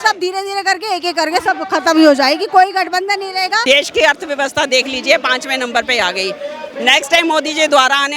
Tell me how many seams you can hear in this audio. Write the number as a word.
one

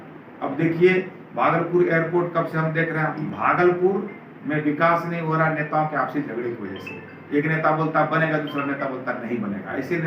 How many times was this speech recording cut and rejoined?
one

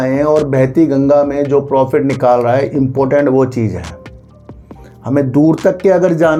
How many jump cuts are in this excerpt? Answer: zero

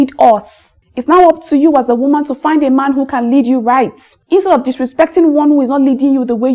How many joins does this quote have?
zero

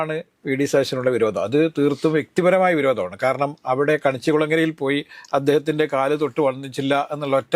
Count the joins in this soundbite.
zero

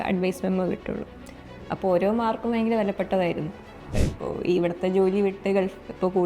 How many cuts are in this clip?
one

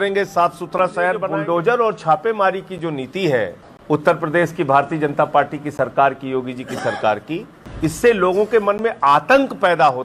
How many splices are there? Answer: three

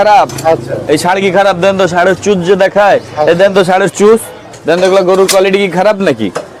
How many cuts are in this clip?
zero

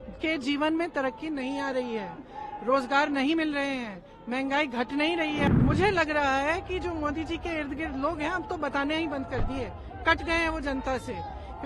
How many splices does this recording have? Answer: one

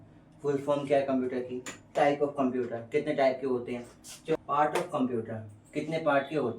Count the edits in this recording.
two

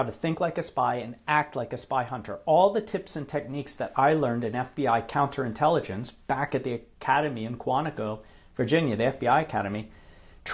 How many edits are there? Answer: zero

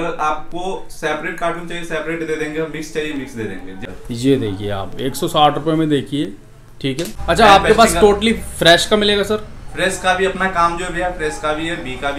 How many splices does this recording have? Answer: two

